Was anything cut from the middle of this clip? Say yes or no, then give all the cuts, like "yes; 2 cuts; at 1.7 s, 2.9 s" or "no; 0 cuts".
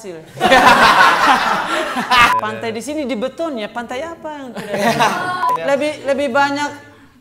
yes; 2 cuts; at 2.3 s, 5.6 s